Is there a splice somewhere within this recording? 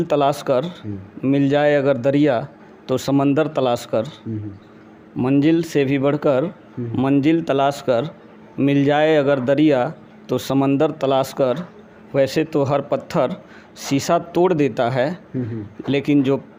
no; 0 cuts

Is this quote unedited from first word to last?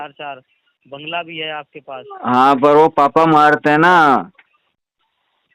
yes; 0 cuts

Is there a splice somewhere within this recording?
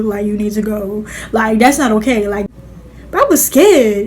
yes; 1 cut; at 2.4 s

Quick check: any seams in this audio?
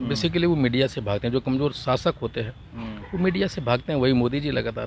no; 0 cuts

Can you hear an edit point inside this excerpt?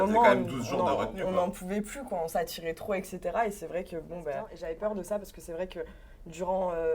yes; 1 cut; at 4.5 s

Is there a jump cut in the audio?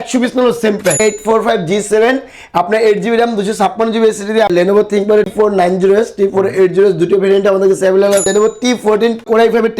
yes; 3 cuts; at 1.0 s, 4.5 s, 8.3 s

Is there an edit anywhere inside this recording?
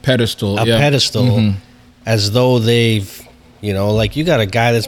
no; 0 cuts

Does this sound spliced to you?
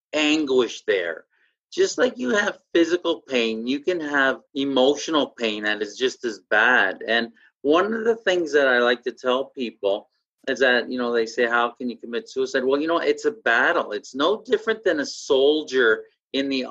yes; 1 cut; at 4.5 s

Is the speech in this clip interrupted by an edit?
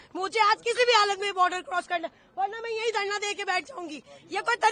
no; 0 cuts

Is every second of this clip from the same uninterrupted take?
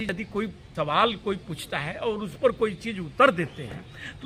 yes; 0 cuts

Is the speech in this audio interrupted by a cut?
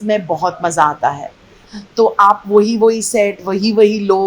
yes; 1 cut; at 1.6 s

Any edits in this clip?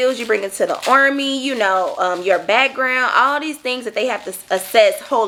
no; 0 cuts

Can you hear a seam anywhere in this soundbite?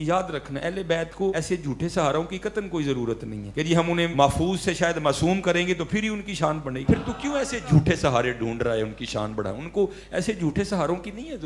yes; 4 cuts; at 1.3 s, 3.4 s, 4.1 s, 6.8 s

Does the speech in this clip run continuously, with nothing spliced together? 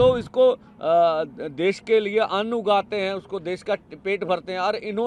yes; 0 cuts

